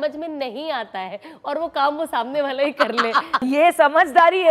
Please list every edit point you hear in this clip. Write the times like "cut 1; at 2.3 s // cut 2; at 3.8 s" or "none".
cut 1; at 3.4 s